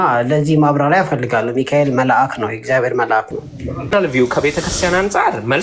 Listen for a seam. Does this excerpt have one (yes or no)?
yes